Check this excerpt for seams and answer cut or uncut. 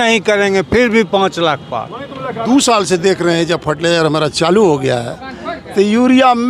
cut